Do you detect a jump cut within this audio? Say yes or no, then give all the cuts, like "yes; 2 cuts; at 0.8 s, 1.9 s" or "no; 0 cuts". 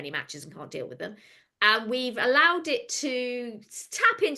no; 0 cuts